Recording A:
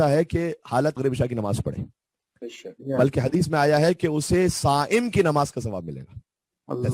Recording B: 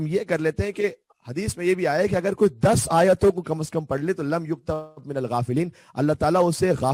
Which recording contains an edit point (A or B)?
A